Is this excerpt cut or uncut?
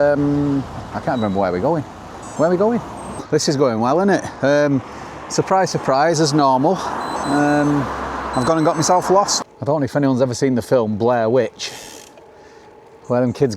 cut